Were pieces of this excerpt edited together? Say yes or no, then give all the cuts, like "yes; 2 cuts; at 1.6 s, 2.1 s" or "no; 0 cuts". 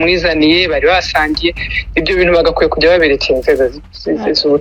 no; 0 cuts